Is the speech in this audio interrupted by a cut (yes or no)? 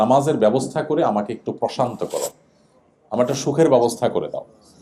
no